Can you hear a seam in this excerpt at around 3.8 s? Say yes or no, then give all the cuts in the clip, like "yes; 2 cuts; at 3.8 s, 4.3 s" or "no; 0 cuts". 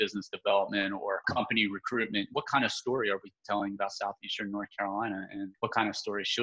no; 3 cuts; at 1.3 s, 2.3 s, 5.5 s